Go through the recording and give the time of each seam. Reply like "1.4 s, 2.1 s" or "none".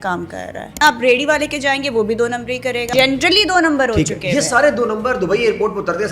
0.8 s, 2.9 s

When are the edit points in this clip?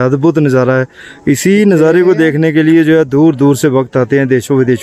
none

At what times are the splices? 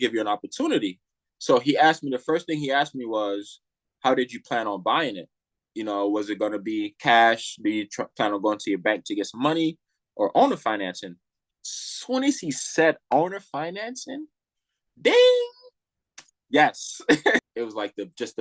17.5 s

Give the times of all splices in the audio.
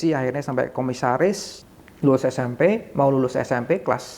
1.5 s

